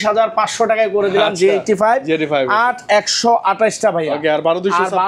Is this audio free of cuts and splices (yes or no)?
yes